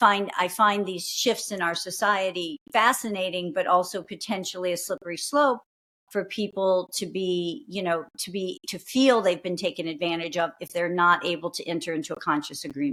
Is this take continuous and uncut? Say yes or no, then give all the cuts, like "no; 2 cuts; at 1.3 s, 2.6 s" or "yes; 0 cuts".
yes; 0 cuts